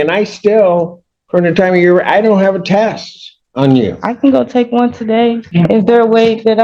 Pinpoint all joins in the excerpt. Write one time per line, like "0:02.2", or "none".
0:05.4